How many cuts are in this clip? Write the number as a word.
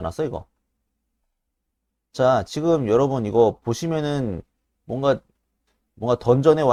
zero